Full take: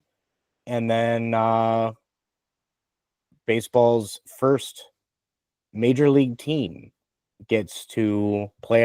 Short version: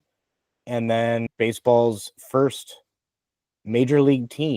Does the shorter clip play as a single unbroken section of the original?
no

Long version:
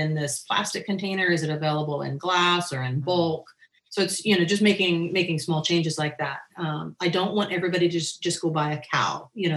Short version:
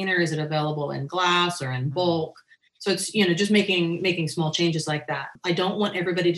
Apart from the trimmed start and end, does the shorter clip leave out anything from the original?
yes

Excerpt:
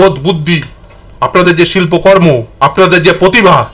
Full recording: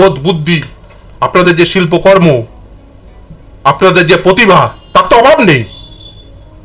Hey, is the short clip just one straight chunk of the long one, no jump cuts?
no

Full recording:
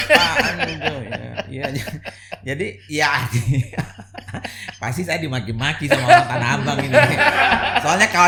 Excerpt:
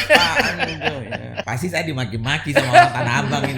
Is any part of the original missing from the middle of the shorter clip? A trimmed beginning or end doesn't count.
yes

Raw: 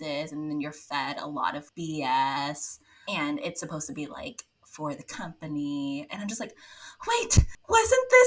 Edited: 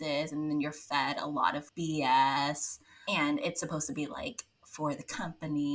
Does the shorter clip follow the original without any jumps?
yes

